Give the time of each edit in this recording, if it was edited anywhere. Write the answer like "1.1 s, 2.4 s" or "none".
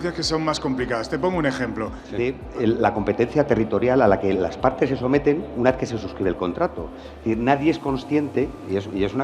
2.0 s